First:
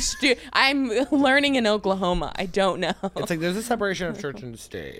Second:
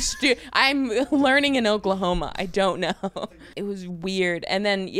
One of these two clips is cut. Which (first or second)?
second